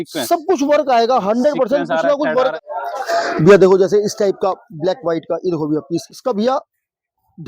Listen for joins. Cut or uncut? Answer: cut